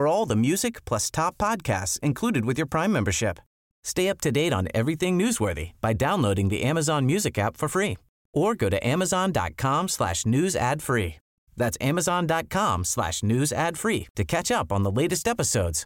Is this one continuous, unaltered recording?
yes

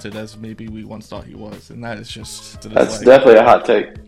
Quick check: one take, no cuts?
no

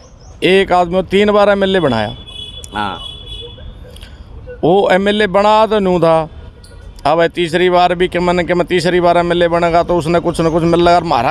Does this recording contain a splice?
no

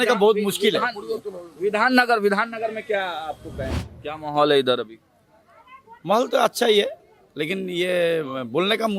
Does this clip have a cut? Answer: yes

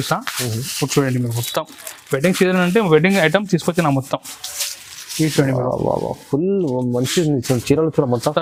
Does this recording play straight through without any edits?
yes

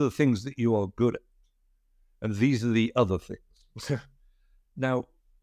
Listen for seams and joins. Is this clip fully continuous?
yes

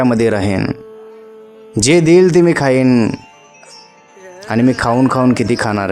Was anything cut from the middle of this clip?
no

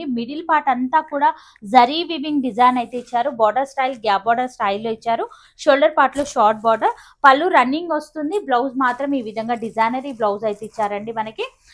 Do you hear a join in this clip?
no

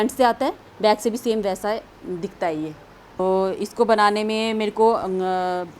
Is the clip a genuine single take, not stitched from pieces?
no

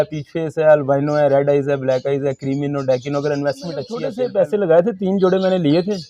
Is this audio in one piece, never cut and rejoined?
no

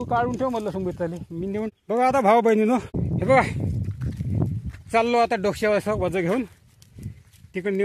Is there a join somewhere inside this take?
yes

